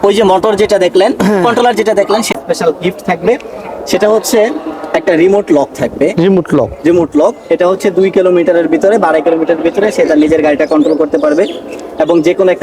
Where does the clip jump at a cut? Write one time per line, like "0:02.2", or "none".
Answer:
0:02.4